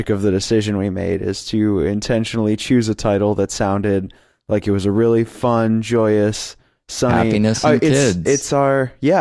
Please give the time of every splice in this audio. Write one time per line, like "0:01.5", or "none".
0:05.8